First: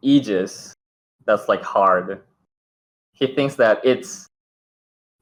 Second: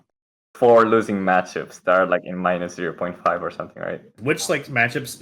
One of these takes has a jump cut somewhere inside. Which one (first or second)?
second